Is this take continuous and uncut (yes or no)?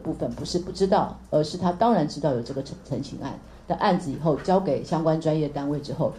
yes